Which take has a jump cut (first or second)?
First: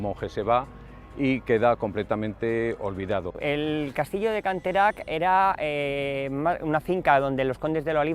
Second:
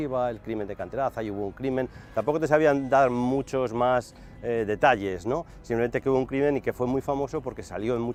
first